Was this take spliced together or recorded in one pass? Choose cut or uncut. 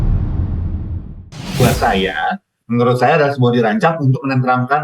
cut